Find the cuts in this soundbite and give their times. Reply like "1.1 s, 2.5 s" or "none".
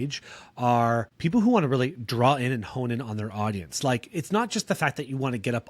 1.1 s

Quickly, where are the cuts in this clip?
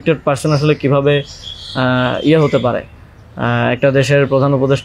none

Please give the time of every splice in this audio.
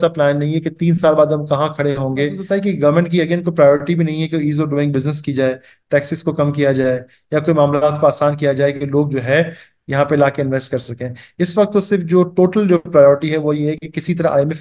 2.4 s

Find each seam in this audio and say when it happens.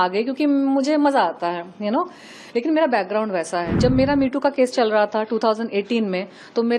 3.7 s

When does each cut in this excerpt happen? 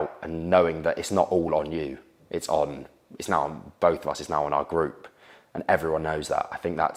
none

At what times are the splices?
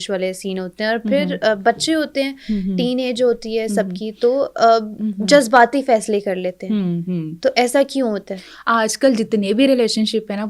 none

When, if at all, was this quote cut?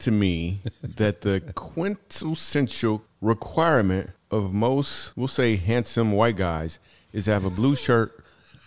3.1 s, 4.2 s, 5.0 s

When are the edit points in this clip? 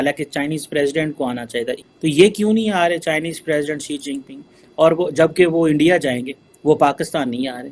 none

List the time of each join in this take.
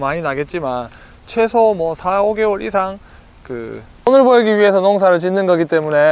4.1 s

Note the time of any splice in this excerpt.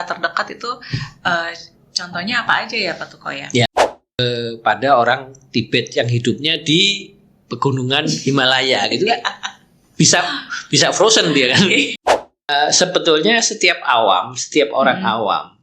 3.7 s, 12.5 s

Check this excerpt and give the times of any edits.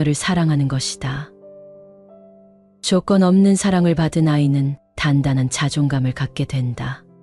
1.3 s, 2.8 s

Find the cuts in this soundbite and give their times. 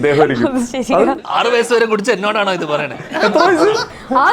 1.2 s

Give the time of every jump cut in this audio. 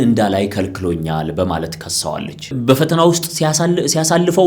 2.3 s

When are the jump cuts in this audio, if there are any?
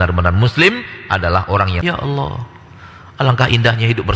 1.7 s

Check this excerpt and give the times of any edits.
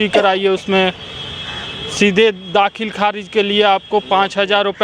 none

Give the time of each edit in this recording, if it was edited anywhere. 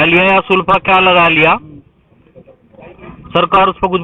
none

